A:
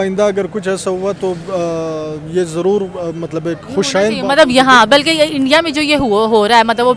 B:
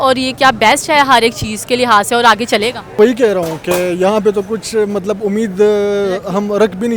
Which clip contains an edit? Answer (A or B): B